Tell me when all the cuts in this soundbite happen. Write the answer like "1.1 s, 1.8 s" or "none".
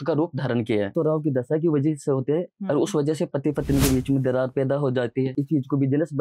0.9 s, 5.3 s